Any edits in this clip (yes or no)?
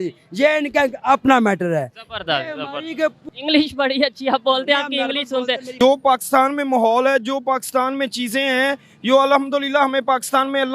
yes